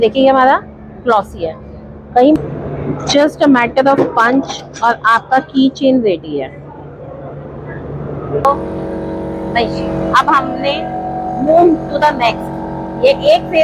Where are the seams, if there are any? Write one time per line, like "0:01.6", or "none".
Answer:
0:02.4
0:08.4